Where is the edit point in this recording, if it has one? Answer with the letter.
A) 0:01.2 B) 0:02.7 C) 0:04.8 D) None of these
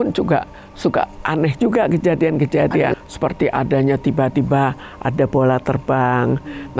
B